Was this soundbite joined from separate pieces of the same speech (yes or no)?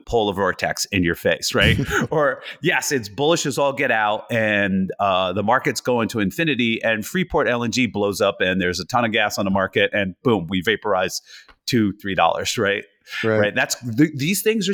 no